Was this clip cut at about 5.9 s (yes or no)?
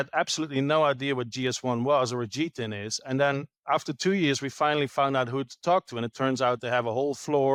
no